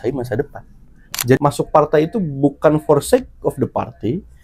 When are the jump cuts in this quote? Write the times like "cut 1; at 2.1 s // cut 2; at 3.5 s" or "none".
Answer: cut 1; at 1.4 s